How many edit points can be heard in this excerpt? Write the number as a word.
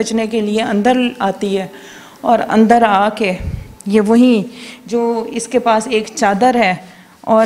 zero